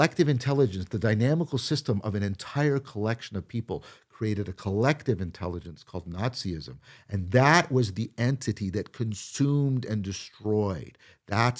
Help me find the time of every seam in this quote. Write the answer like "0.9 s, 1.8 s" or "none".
none